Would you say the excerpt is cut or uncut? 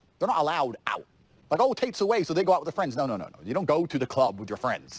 uncut